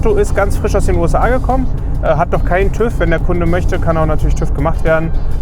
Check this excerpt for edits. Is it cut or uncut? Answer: uncut